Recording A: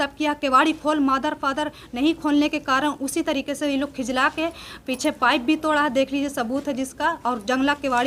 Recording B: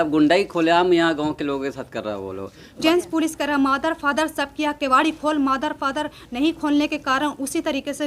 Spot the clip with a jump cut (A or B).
B